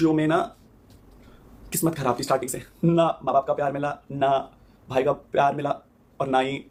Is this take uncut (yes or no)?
yes